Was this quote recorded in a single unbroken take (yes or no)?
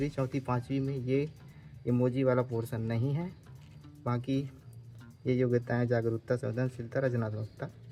yes